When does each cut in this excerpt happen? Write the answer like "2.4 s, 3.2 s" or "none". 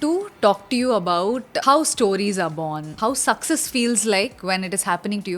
1.5 s, 2.9 s